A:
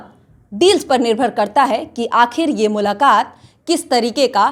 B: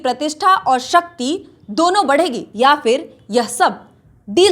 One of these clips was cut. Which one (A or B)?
B